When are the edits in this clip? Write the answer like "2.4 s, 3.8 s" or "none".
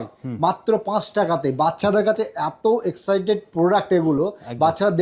none